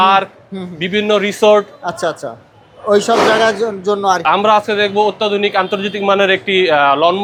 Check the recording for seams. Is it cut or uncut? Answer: uncut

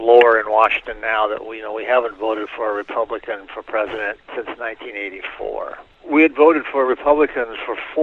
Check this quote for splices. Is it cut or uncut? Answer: uncut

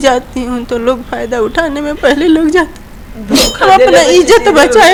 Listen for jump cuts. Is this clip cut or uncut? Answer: uncut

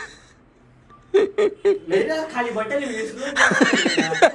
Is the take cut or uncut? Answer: uncut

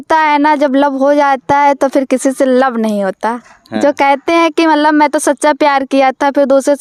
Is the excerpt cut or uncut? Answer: uncut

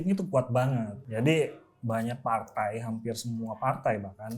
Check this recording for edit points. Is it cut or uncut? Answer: cut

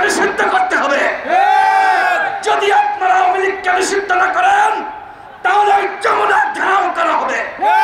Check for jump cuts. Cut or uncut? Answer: uncut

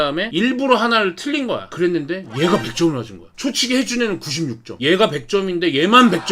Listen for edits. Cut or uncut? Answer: cut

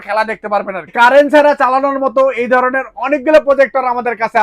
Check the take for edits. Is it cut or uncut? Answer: cut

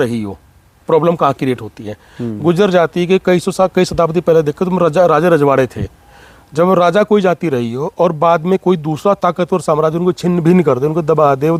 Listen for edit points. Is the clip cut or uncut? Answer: uncut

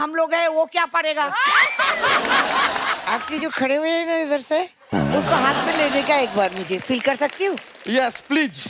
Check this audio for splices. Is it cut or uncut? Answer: cut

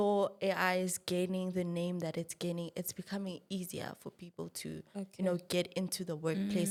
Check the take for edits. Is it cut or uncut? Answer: uncut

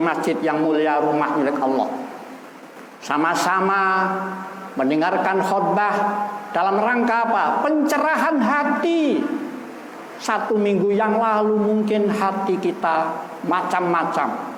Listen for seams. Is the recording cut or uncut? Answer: uncut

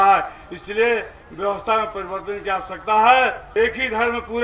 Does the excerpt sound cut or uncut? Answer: cut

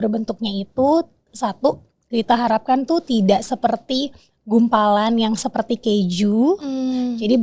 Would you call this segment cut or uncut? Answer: uncut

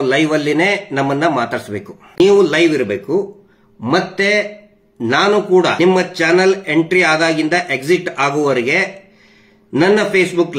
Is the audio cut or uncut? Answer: cut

